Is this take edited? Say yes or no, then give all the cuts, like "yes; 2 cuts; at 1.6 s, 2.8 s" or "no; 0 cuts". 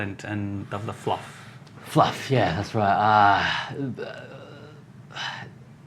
no; 0 cuts